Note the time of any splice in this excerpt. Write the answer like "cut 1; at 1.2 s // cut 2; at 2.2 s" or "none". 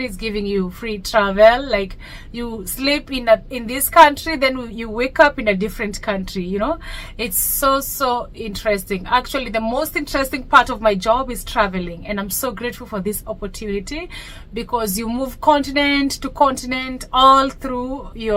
none